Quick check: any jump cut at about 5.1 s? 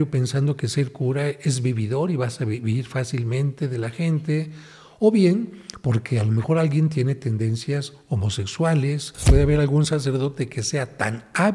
no; 1 cut; at 9.2 s

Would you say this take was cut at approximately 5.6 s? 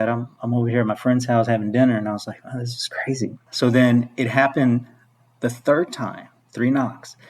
no; 1 cut; at 3.5 s

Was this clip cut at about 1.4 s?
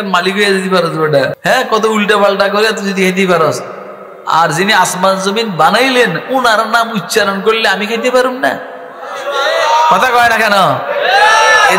yes; 1 cut; at 1.4 s

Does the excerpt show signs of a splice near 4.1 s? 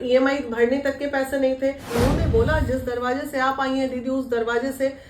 no; 1 cut; at 1.9 s

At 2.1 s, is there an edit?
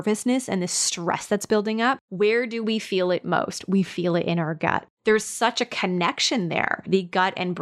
yes; 2 cuts; at 2.1 s, 4.9 s

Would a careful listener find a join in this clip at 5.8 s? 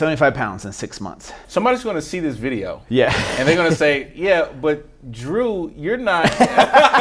no; 1 cut; at 1.4 s

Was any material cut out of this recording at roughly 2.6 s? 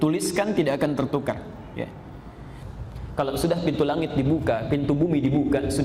yes; 1 cut; at 2.6 s

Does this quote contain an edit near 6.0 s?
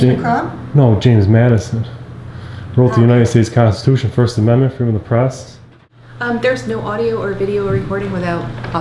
yes; 1 cut; at 6.0 s

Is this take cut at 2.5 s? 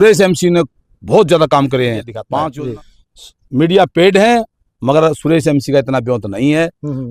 yes; 1 cut; at 2.5 s

